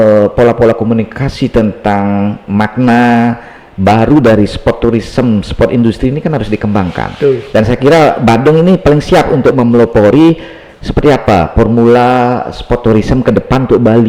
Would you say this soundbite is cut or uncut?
uncut